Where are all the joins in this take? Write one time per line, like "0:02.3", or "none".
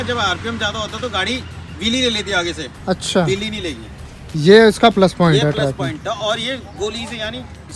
none